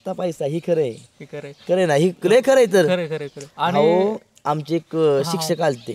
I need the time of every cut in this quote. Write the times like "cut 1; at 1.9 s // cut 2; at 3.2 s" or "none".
none